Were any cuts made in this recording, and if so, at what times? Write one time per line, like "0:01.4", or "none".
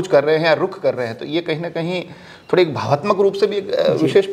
none